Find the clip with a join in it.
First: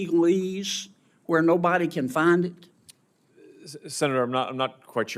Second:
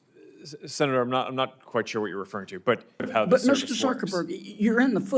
second; 1 cut; at 3.1 s

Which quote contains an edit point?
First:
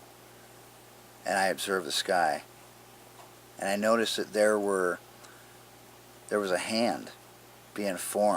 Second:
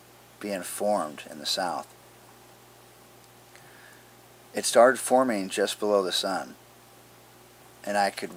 first; 1 cut; at 6.4 s

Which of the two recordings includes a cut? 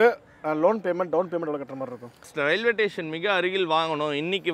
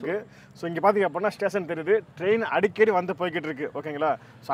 first; 1 cut; at 2.3 s

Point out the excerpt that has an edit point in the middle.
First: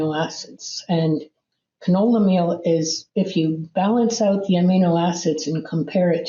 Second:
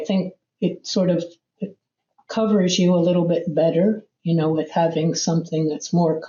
first; 1 cut; at 3.0 s

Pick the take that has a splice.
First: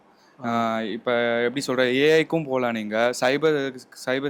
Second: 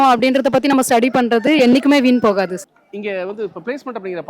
second; 1 cut; at 2.7 s

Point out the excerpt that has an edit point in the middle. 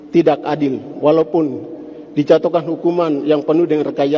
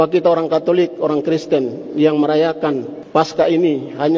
second; 1 cut; at 2.9 s

